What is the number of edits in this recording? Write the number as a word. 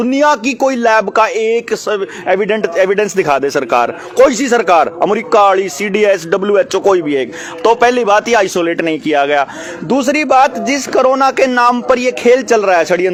zero